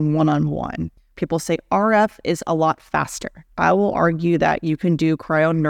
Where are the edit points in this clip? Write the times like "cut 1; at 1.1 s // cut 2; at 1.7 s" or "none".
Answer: cut 1; at 1.1 s // cut 2; at 3.4 s